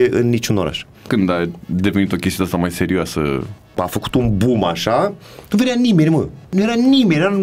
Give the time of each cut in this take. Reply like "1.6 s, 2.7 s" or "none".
1.1 s, 3.8 s, 6.5 s